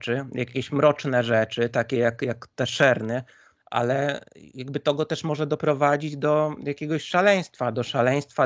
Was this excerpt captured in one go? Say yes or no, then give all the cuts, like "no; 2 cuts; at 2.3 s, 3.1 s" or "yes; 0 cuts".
no; 1 cut; at 3.5 s